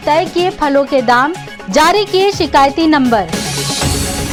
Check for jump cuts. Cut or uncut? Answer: uncut